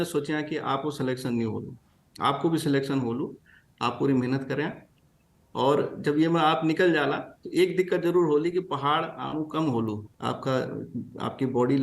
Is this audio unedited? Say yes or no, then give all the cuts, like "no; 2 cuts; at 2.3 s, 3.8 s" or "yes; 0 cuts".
no; 1 cut; at 10.1 s